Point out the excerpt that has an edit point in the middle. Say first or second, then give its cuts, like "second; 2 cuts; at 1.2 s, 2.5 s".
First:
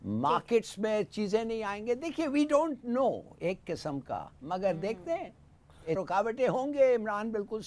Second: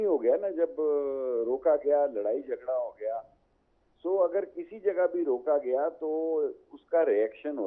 first; 1 cut; at 6.0 s